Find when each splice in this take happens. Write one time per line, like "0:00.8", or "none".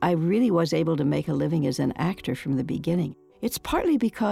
0:03.3

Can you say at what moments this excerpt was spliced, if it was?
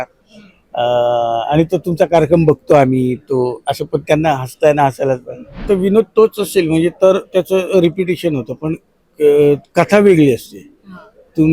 0:05.6

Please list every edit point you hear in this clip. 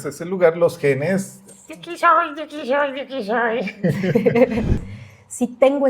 0:04.8

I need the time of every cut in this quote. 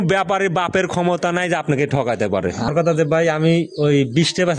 0:02.6

